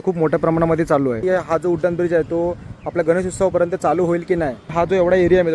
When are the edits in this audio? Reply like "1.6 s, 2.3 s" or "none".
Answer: 1.2 s, 4.7 s